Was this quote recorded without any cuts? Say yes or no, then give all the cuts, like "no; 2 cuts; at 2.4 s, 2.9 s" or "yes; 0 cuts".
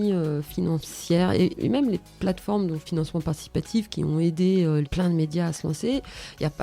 no; 3 cuts; at 1.6 s, 2.8 s, 4.9 s